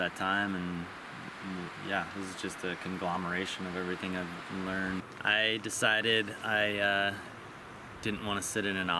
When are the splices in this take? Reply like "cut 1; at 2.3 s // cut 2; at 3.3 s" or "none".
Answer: cut 1; at 5.0 s